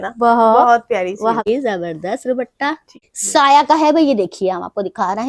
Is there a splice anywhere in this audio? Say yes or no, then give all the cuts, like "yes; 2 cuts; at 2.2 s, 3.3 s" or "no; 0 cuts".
yes; 2 cuts; at 1.5 s, 3.1 s